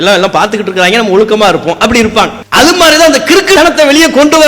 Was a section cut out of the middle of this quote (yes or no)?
yes